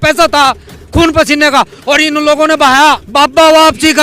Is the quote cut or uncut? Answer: cut